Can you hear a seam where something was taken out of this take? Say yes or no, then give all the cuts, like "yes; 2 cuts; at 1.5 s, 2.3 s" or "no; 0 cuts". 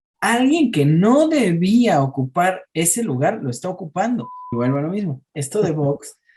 yes; 1 cut; at 4.5 s